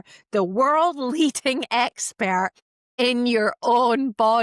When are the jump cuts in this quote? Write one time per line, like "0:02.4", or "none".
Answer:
none